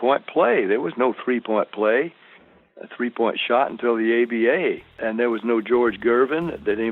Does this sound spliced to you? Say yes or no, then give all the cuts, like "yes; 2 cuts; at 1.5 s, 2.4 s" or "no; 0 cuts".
yes; 1 cut; at 5.0 s